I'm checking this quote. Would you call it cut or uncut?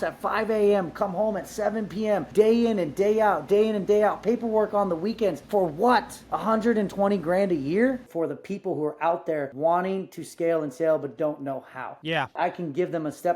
cut